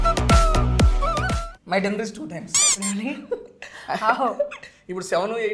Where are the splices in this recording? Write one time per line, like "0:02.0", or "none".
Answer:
0:01.4